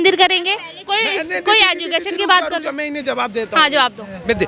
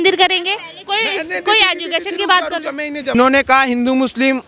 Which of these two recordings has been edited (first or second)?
second